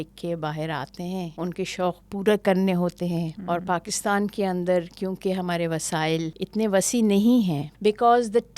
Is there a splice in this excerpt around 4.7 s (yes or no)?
no